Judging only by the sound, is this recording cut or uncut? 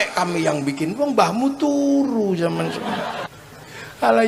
cut